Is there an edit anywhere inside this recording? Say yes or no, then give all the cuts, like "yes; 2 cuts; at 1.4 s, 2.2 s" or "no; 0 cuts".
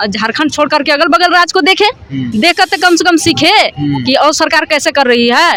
no; 0 cuts